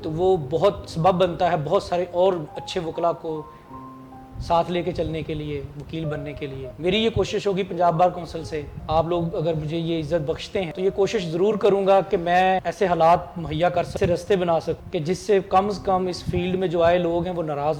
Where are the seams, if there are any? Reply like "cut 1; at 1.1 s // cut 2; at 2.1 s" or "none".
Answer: none